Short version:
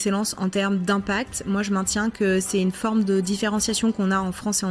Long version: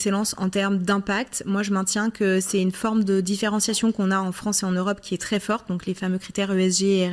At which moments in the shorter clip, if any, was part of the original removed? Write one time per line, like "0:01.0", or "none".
none